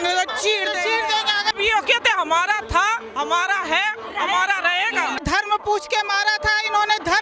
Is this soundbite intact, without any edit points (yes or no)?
no